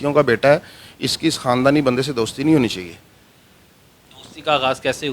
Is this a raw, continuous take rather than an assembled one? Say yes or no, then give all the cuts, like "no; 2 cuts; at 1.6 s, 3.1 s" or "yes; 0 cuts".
yes; 0 cuts